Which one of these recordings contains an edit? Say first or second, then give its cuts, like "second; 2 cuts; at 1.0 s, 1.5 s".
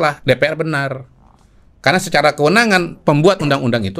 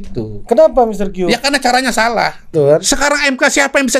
second; 1 cut; at 2.5 s